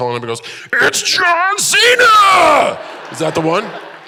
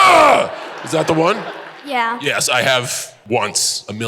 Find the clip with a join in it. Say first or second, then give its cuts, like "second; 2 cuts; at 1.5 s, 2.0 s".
second; 1 cut; at 3.1 s